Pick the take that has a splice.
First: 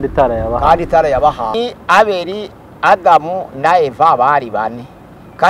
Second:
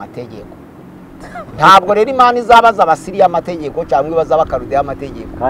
first; 1 cut; at 1.5 s

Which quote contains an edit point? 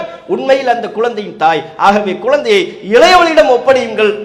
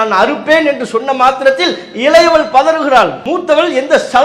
second; 1 cut; at 3.2 s

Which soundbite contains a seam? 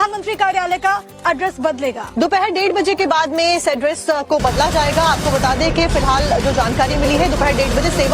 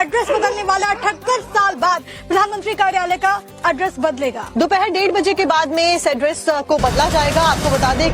first; 1 cut; at 6.7 s

